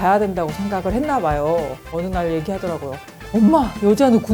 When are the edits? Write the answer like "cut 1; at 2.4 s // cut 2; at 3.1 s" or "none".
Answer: cut 1; at 1.8 s